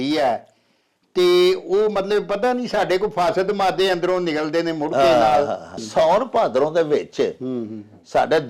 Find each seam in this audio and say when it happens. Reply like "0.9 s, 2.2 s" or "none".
5.8 s